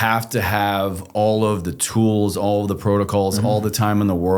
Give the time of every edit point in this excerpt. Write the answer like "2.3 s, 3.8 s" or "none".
1.0 s